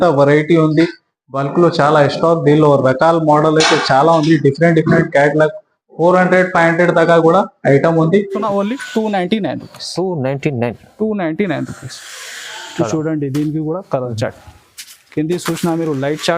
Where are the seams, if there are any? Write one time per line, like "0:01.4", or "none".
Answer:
0:08.4